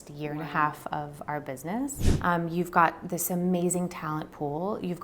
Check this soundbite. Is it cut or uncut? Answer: cut